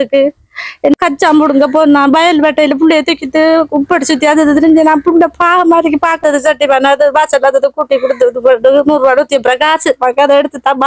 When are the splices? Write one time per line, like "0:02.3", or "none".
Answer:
0:00.9
0:06.2